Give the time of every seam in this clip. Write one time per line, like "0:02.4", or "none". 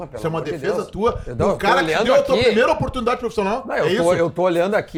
none